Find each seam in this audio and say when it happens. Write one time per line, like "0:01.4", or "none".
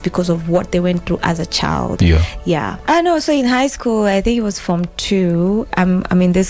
none